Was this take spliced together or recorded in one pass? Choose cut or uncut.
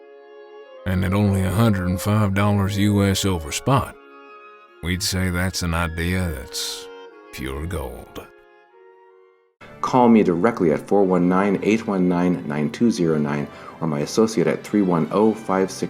cut